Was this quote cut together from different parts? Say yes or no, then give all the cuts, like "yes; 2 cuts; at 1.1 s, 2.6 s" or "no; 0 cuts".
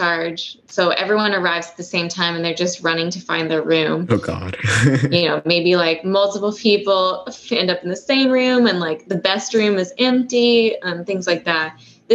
no; 0 cuts